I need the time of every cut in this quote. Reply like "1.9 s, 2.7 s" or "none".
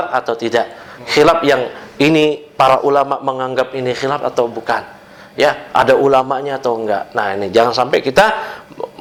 none